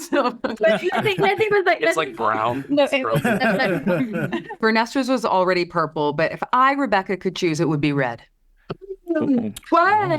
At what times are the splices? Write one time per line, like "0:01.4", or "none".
0:04.5